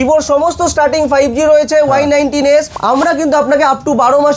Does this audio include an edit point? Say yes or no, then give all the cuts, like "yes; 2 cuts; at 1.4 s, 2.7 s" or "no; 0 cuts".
yes; 1 cut; at 2.7 s